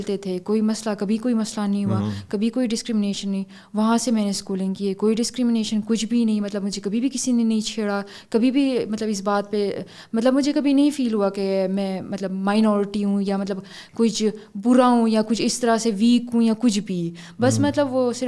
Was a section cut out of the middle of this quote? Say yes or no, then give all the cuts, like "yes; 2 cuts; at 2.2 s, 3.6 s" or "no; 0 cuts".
no; 0 cuts